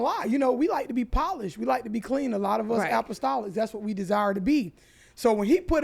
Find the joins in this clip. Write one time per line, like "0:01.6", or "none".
none